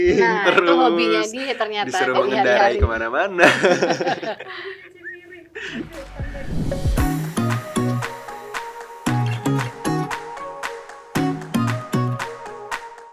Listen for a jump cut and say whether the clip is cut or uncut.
uncut